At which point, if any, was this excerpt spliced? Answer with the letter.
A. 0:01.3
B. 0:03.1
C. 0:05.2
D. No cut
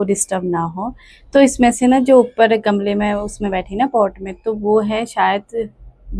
D